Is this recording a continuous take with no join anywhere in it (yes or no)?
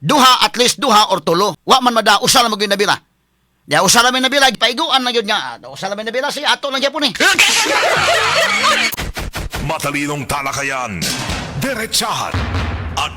no